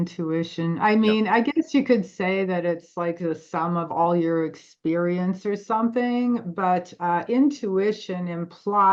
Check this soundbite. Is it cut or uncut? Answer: uncut